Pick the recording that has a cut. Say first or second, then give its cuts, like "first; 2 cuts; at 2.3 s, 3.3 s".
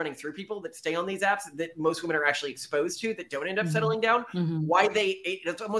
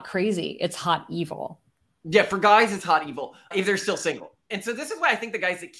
second; 1 cut; at 4.4 s